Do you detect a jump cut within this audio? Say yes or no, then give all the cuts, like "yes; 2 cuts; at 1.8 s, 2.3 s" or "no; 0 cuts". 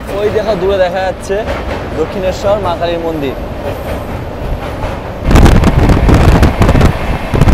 yes; 1 cut; at 5.3 s